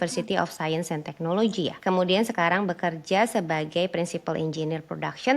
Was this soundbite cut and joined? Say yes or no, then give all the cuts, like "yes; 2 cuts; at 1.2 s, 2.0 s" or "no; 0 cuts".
yes; 1 cut; at 1.8 s